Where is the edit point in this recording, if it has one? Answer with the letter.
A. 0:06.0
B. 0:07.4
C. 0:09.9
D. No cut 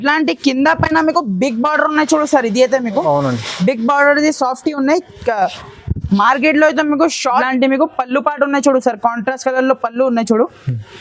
B